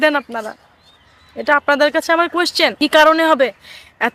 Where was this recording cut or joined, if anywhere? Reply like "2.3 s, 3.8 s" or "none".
2.7 s